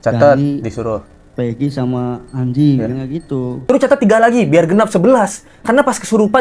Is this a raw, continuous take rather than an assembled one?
no; 1 cut; at 3.6 s

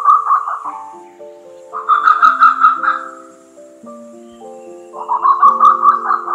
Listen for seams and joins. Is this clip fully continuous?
yes; 0 cuts

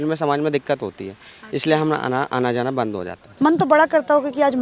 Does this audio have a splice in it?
yes; 1 cut; at 3.2 s

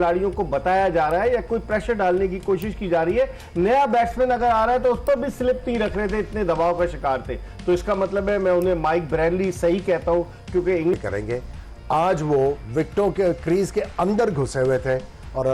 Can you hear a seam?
yes; 1 cut; at 10.9 s

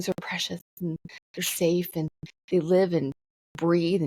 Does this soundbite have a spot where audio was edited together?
no; 0 cuts

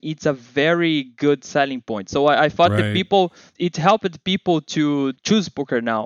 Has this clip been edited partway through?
yes; 1 cut; at 3.5 s

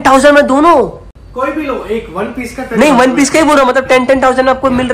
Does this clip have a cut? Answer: no; 0 cuts

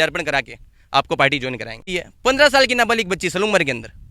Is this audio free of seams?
no; 1 cut; at 1.9 s

